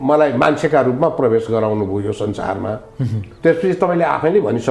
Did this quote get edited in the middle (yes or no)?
no